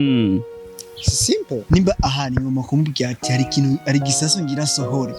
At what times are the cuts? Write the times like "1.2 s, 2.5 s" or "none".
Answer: 1.6 s